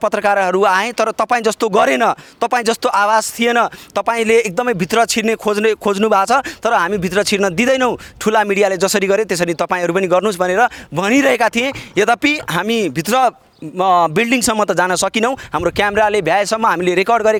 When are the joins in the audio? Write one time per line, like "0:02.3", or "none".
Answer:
none